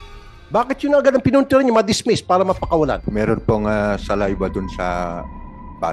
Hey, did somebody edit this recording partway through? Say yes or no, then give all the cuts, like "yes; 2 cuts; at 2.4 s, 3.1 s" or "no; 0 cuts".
yes; 1 cut; at 3.0 s